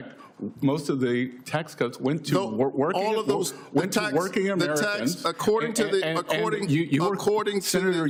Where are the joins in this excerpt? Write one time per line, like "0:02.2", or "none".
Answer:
none